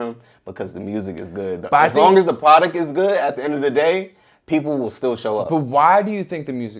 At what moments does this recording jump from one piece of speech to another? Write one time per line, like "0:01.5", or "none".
none